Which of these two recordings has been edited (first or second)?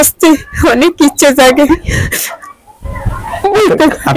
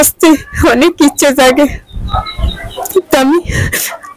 first